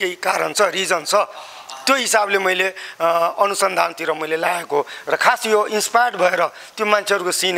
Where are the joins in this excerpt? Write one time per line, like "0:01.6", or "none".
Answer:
none